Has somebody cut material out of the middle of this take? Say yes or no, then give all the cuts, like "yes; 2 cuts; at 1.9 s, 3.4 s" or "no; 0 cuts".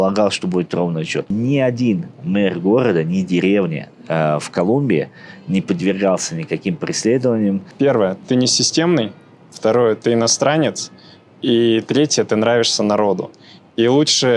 yes; 2 cuts; at 1.3 s, 7.7 s